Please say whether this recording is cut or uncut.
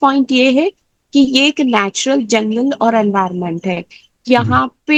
uncut